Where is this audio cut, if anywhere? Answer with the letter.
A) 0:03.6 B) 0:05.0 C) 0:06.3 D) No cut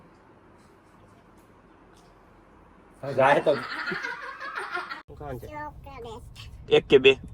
B